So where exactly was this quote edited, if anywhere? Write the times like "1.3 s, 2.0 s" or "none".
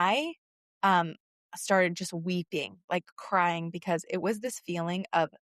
none